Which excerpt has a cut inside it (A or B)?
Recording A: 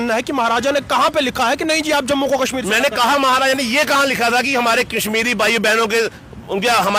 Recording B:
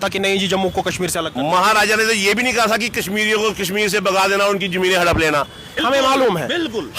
B